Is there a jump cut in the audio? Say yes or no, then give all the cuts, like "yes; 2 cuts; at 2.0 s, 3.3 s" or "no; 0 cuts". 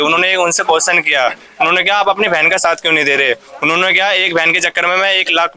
no; 0 cuts